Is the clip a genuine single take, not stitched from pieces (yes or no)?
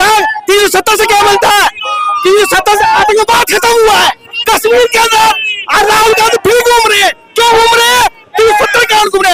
yes